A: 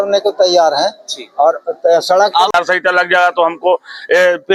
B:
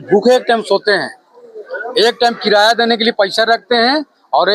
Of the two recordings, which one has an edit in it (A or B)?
A